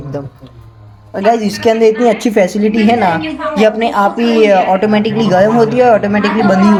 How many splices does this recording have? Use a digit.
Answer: 0